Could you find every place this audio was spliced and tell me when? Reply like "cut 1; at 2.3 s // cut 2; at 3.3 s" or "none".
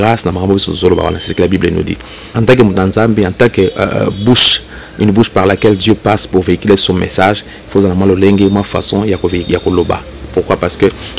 cut 1; at 2.1 s

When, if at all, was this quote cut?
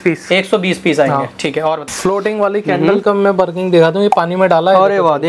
cut 1; at 1.8 s

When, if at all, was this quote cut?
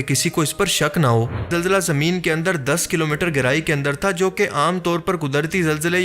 cut 1; at 1.5 s

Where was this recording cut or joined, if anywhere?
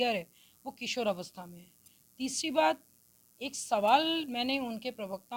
none

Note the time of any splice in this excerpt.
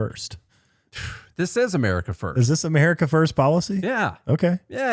none

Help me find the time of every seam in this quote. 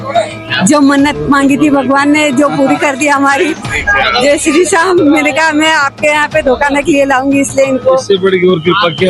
none

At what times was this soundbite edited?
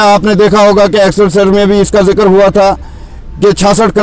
none

